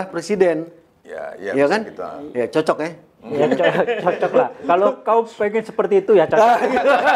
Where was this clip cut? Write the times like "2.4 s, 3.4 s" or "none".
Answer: none